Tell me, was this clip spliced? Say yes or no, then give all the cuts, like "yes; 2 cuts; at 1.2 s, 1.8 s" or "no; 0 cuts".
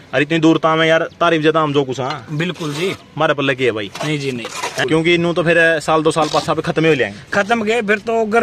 yes; 1 cut; at 4.7 s